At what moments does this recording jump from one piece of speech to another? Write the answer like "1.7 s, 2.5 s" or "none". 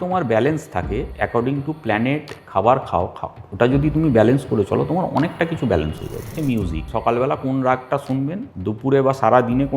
1.1 s, 6.5 s, 8.5 s